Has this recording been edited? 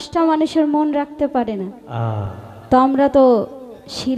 no; 0 cuts

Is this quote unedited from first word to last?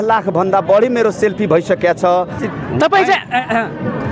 no; 1 cut; at 2.4 s

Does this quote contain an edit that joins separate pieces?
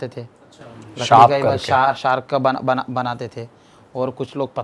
no; 0 cuts

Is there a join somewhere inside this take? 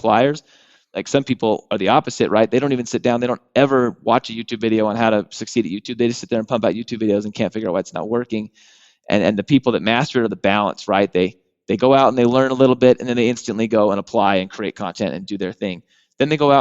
yes; 1 cut; at 1.0 s

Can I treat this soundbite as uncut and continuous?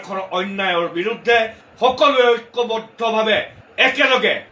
no; 1 cut; at 1.6 s

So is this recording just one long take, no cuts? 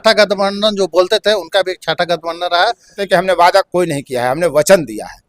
no; 1 cut; at 3.0 s

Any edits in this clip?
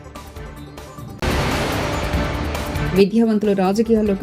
yes; 2 cuts; at 1.1 s, 2.8 s

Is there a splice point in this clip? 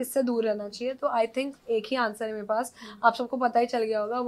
no; 0 cuts

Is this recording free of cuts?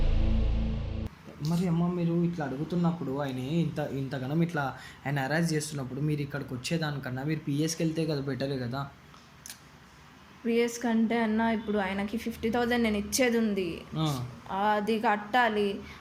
yes; 0 cuts

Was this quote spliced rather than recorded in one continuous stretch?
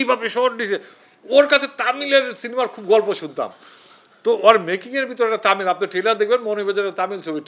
no; 0 cuts

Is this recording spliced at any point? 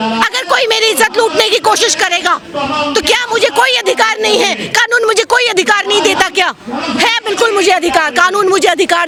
no; 0 cuts

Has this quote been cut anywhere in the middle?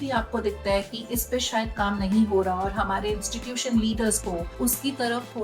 yes; 1 cut; at 4.5 s

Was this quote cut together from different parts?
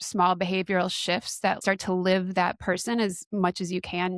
yes; 1 cut; at 1.6 s

